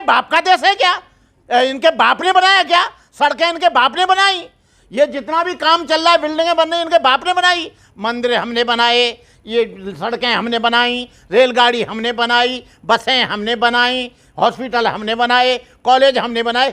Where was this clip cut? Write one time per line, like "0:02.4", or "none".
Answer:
none